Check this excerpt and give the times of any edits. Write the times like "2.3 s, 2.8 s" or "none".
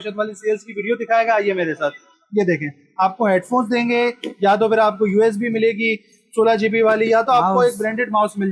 none